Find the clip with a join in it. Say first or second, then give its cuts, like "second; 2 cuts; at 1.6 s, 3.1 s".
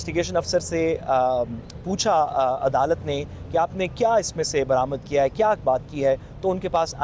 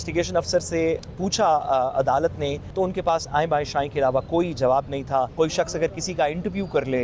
second; 3 cuts; at 1.0 s, 2.6 s, 5.3 s